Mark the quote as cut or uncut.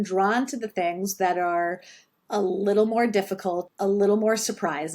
cut